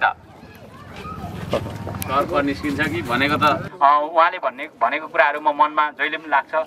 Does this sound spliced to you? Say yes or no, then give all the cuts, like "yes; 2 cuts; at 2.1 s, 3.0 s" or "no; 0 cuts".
yes; 1 cut; at 3.7 s